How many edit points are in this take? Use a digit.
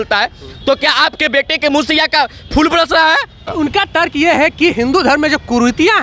1